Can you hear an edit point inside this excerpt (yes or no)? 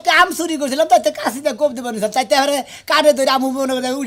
no